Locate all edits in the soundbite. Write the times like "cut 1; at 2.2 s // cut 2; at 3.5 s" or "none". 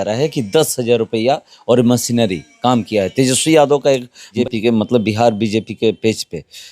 cut 1; at 4.3 s